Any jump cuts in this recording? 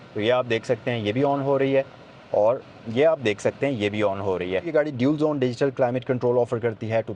yes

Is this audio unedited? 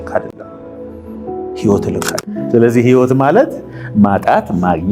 no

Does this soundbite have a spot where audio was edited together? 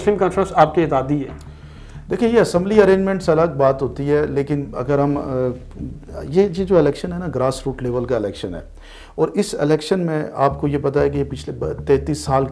no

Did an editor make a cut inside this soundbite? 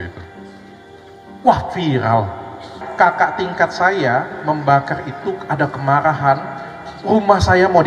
yes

